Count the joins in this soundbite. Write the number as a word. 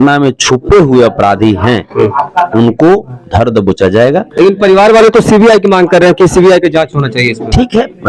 zero